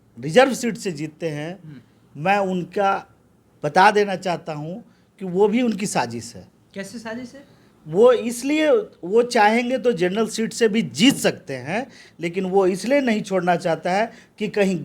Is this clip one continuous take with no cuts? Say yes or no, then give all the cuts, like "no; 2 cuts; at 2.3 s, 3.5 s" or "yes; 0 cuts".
yes; 0 cuts